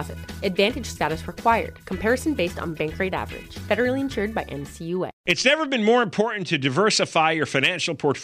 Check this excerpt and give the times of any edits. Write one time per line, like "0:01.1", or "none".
0:05.2